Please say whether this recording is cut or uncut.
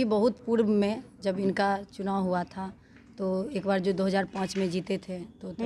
uncut